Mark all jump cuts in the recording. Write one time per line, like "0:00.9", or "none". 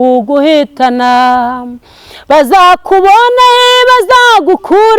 none